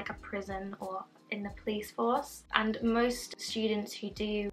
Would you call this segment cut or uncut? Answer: uncut